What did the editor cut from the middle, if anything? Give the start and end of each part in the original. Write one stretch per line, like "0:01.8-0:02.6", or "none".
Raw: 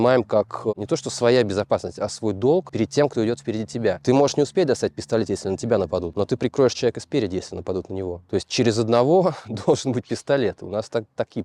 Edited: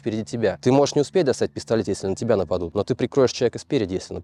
none